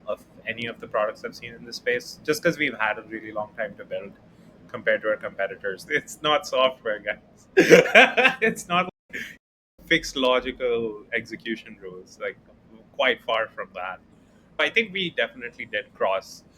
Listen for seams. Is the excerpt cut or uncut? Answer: cut